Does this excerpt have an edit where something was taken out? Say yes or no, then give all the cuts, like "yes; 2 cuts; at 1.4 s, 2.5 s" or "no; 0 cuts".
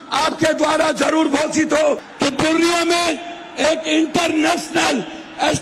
yes; 1 cut; at 2.1 s